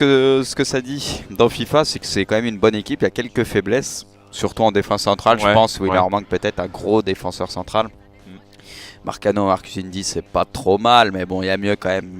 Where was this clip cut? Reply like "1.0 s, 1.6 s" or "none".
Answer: 2.0 s